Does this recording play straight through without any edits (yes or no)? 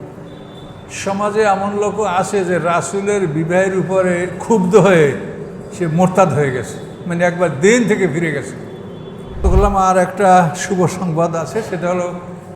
no